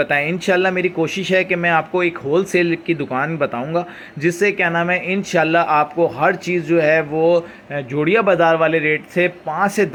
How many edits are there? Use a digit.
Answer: 0